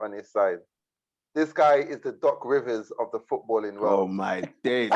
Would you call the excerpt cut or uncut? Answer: cut